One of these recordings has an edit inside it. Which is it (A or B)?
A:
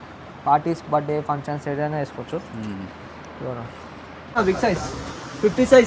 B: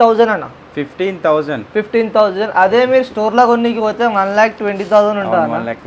A